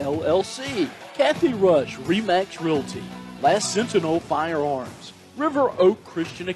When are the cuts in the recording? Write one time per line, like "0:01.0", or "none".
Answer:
0:01.0